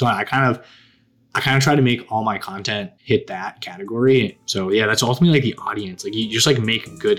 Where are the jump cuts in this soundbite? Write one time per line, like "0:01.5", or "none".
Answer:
0:02.9
0:04.4